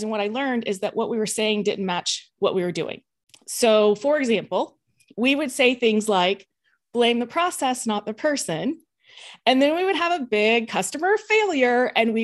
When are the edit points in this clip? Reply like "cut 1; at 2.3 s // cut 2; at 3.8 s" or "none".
none